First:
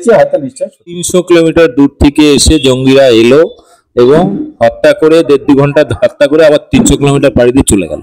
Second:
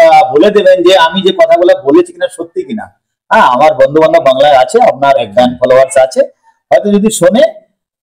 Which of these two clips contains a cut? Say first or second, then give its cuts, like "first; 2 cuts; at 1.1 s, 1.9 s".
first; 1 cut; at 1.0 s